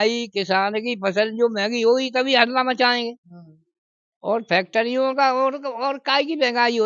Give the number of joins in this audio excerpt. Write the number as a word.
zero